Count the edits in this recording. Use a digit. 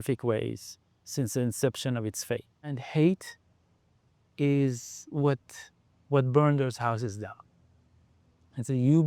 1